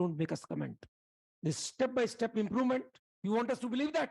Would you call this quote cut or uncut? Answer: uncut